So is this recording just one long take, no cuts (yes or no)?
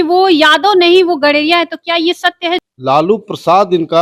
no